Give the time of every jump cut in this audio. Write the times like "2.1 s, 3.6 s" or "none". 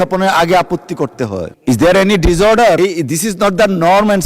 1.5 s, 2.8 s